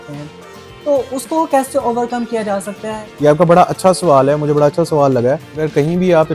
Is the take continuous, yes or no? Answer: no